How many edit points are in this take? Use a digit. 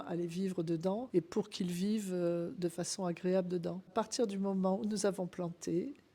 2